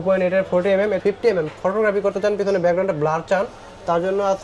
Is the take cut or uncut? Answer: cut